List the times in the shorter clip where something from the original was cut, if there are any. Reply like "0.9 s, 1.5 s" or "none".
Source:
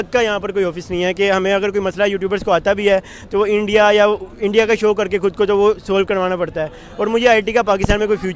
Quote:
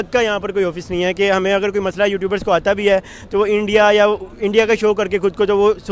none